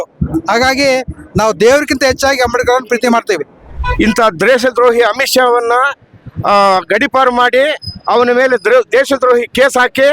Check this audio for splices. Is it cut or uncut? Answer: cut